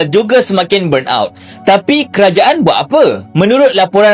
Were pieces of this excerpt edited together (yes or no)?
no